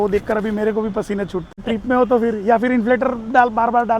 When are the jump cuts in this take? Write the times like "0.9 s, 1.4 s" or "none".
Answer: 1.6 s